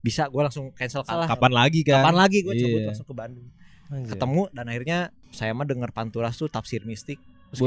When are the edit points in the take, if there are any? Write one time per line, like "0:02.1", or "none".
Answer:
0:01.1
0:05.2